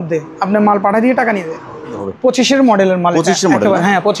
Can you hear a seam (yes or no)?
yes